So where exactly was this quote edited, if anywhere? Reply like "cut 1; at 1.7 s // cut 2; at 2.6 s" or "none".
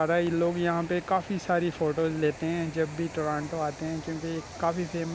none